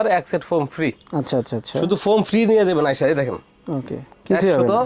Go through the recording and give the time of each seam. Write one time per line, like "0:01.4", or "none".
none